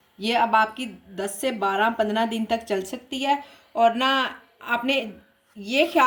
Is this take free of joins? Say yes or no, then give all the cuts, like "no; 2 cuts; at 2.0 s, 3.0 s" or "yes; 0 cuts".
yes; 0 cuts